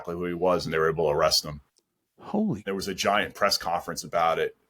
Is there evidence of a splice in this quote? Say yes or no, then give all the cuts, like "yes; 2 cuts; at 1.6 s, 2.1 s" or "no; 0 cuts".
yes; 1 cut; at 2.6 s